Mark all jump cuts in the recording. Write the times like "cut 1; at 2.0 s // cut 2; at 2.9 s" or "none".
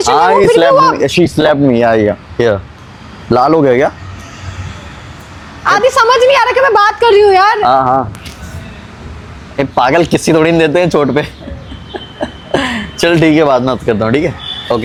none